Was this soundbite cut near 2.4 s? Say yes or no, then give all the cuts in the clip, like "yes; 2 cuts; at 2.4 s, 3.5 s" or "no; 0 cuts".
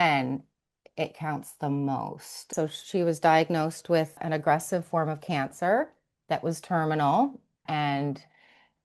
yes; 3 cuts; at 2.4 s, 4.2 s, 7.6 s